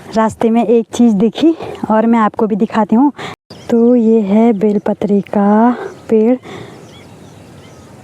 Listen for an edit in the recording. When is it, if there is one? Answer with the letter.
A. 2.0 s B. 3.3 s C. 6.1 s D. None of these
B